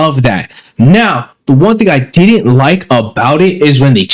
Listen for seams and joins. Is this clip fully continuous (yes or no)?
yes